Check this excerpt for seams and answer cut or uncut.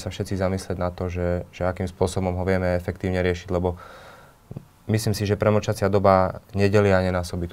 uncut